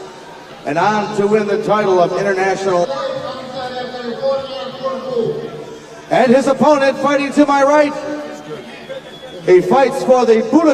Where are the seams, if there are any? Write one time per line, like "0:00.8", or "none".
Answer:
none